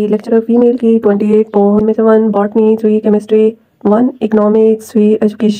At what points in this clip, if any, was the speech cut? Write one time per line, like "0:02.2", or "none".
0:01.8